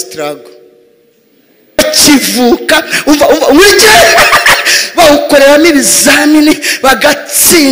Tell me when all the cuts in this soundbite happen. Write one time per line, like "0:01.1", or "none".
0:01.8